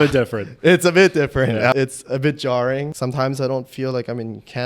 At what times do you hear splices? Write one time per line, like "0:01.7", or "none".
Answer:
0:01.7
0:02.9